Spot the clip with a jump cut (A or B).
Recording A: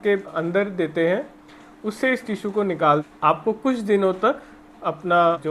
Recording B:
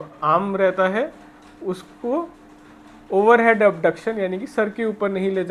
A